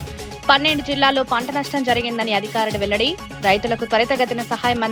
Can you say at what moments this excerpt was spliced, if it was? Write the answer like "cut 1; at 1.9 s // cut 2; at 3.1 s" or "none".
none